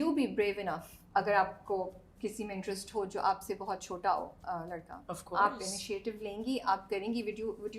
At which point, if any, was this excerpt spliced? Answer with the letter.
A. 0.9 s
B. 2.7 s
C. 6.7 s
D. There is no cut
A